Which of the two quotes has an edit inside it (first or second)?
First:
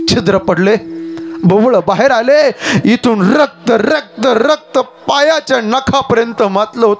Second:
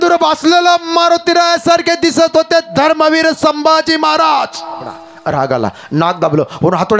second